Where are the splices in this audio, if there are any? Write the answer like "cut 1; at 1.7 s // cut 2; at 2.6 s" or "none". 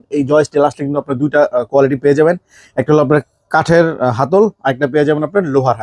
none